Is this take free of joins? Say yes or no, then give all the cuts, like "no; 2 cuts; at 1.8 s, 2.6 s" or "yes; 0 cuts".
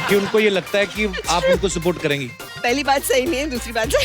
no; 1 cut; at 2.5 s